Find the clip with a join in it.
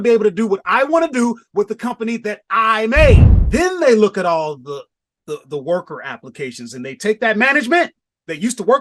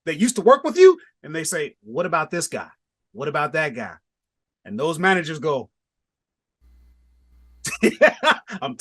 first; 1 cut; at 3.3 s

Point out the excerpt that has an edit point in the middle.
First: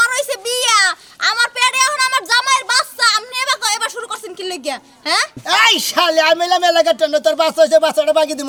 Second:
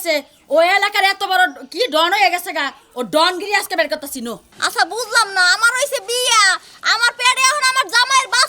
second; 1 cut; at 4.5 s

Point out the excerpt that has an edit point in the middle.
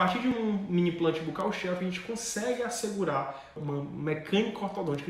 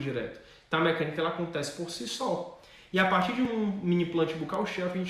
first; 1 cut; at 3.6 s

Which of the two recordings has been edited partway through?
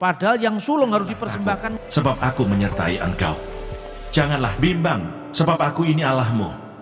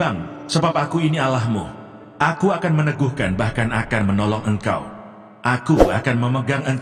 first; 1 cut; at 1.7 s

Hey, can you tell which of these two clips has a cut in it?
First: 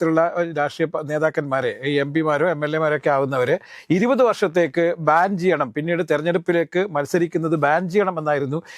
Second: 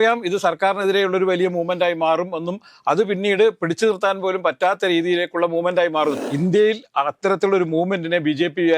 second; 1 cut; at 6.2 s

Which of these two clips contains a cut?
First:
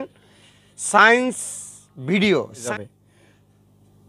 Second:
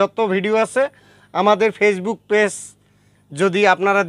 first; 1 cut; at 2.6 s

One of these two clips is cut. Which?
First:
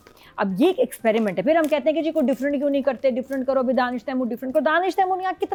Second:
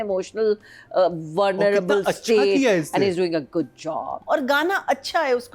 second; 1 cut; at 4.1 s

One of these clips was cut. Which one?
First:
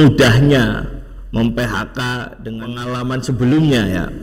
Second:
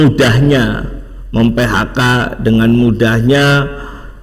first; 1 cut; at 2.4 s

